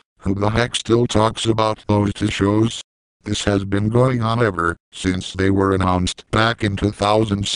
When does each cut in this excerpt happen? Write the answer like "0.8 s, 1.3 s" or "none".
none